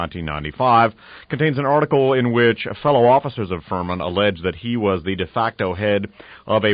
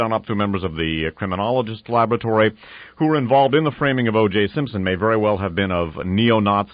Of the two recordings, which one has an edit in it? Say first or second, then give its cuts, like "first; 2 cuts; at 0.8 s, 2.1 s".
first; 1 cut; at 5.5 s